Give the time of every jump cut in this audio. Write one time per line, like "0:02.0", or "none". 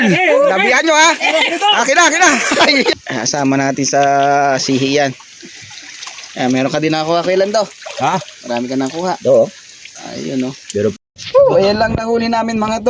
0:02.9
0:11.0